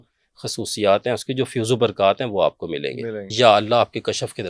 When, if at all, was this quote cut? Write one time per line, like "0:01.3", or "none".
0:03.3